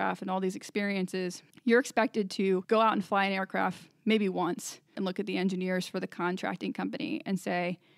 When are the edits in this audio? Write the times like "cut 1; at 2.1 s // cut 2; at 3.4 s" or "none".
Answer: cut 1; at 1.4 s // cut 2; at 2.6 s // cut 3; at 4.9 s